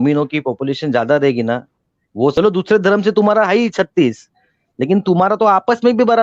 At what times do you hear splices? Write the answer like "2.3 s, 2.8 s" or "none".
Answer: 2.3 s